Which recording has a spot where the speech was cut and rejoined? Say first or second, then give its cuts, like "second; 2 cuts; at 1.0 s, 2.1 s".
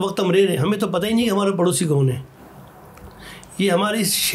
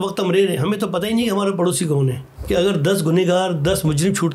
second; 1 cut; at 2.3 s